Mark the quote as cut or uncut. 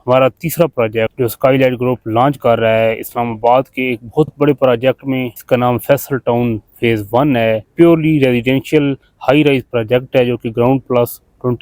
cut